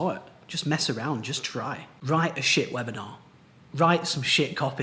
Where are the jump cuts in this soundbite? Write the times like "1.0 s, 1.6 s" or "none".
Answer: 1.9 s

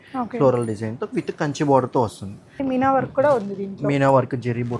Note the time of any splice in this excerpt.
2.6 s

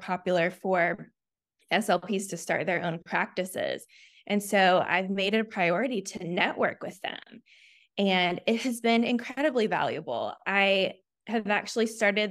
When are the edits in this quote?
none

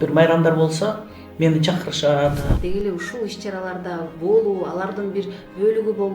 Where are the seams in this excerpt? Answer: 2.5 s

